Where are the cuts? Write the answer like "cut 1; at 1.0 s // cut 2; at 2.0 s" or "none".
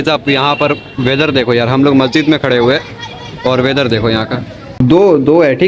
cut 1; at 4.6 s